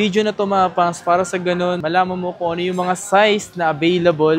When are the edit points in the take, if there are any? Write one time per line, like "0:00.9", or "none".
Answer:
0:01.8